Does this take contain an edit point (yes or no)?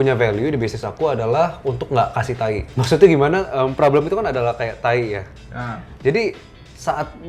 yes